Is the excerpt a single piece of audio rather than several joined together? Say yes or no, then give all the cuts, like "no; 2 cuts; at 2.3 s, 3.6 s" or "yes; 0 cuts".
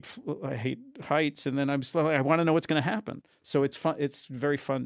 yes; 0 cuts